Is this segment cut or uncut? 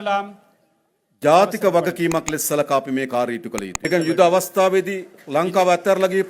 cut